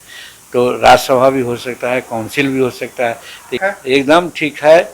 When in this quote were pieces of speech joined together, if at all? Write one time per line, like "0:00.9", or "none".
0:03.6